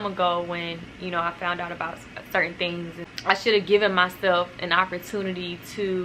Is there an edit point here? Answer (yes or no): yes